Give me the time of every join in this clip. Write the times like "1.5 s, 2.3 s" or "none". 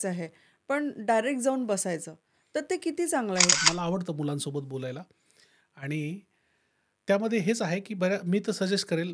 3.5 s